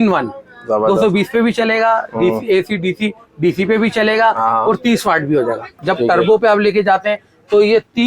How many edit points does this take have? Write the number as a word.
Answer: one